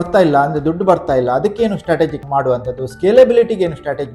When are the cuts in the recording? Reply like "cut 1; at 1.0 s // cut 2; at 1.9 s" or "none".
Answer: cut 1; at 2.2 s